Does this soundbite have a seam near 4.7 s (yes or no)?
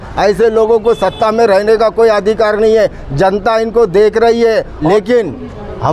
yes